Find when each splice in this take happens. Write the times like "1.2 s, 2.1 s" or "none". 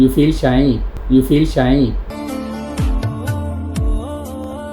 2.1 s